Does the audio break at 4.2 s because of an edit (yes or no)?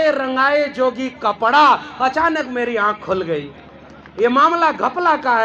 no